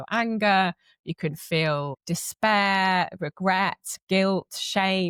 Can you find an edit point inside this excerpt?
no; 0 cuts

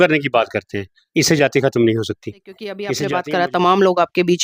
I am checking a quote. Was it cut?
yes; 1 cut; at 2.9 s

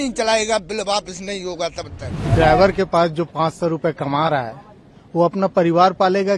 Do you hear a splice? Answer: yes; 1 cut; at 2.3 s

